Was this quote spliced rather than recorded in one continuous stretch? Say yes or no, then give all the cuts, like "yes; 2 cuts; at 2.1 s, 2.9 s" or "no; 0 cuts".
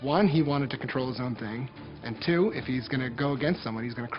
no; 0 cuts